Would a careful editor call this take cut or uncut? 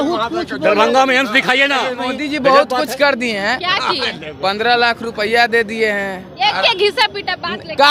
cut